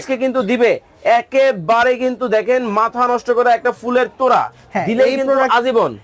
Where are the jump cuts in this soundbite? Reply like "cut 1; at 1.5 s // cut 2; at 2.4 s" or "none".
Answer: none